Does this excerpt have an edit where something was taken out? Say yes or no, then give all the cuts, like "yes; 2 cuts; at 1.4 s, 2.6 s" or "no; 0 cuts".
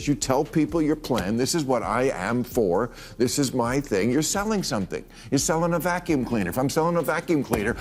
no; 0 cuts